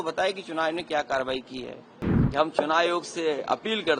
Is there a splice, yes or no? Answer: yes